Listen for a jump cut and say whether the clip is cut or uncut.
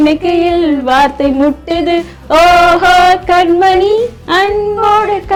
uncut